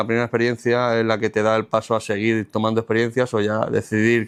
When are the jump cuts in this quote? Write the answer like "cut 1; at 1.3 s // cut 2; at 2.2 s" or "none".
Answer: none

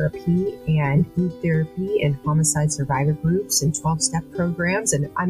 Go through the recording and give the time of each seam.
none

